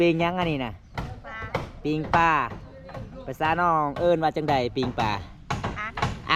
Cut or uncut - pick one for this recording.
uncut